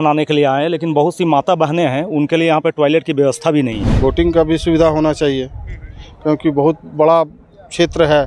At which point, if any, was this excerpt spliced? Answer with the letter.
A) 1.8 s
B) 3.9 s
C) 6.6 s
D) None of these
B